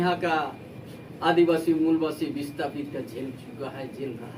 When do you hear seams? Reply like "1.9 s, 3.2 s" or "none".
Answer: none